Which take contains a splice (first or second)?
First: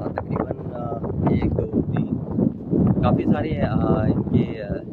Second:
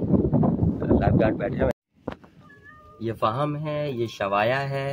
second